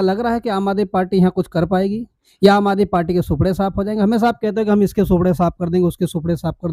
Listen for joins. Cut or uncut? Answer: uncut